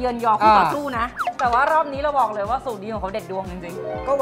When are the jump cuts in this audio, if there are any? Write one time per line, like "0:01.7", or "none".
0:01.2